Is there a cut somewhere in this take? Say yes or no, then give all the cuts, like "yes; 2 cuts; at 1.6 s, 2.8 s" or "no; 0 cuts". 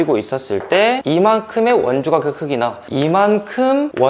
yes; 2 cuts; at 1.0 s, 2.9 s